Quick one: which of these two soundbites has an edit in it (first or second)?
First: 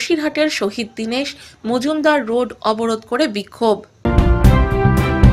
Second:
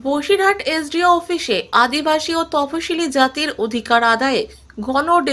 first